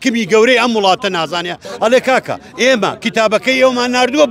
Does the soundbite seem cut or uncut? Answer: cut